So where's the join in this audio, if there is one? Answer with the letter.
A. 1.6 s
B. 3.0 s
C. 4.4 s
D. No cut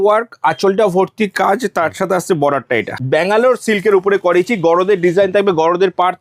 B